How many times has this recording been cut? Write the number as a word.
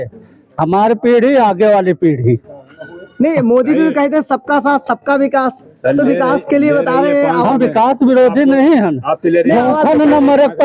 zero